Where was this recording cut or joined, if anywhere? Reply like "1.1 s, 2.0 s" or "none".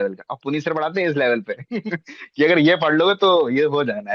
none